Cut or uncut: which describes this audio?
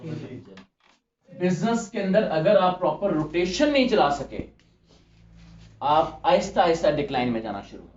cut